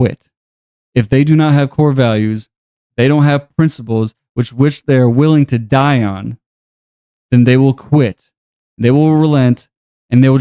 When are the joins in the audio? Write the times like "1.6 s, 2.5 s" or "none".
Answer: none